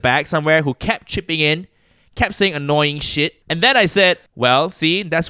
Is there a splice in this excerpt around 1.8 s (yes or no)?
no